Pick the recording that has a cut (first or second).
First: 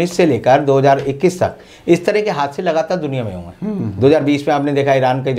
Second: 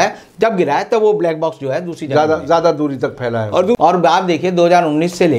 second